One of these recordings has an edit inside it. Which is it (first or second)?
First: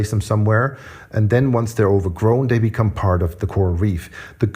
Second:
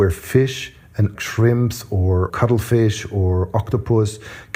first